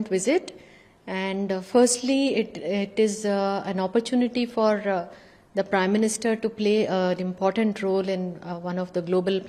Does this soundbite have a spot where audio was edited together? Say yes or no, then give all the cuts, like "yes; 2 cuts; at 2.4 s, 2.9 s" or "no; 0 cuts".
no; 0 cuts